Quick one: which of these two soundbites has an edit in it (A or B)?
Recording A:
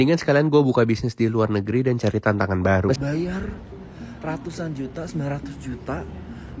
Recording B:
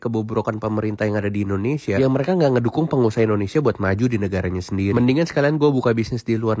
A